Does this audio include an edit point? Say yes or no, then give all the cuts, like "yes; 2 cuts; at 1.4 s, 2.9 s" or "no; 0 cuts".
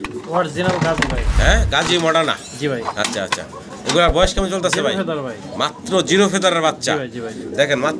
no; 0 cuts